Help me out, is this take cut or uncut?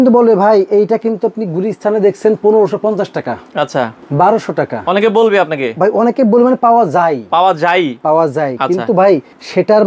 uncut